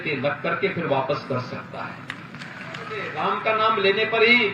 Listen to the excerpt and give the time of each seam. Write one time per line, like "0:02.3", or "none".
0:03.1